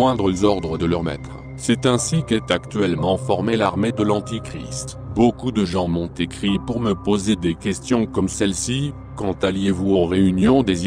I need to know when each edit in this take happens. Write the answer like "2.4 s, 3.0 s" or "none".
none